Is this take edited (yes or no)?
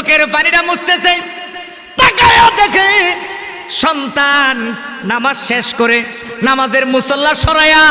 no